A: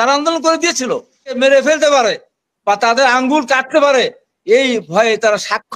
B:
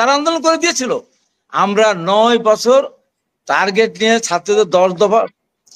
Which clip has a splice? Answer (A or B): A